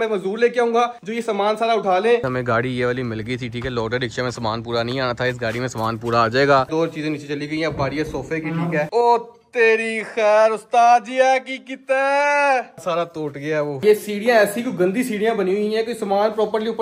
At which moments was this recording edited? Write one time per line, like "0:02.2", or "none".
0:02.2
0:06.7
0:08.9
0:13.8